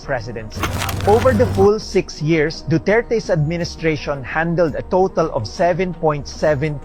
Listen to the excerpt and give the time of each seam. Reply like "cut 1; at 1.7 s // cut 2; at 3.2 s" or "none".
cut 1; at 1.0 s